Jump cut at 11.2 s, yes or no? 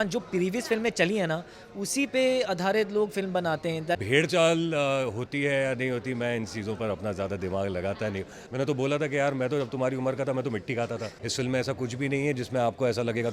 yes